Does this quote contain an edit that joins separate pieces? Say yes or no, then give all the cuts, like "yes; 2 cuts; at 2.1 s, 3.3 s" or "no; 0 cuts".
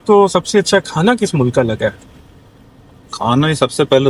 no; 0 cuts